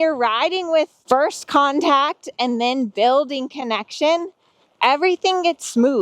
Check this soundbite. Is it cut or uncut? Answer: cut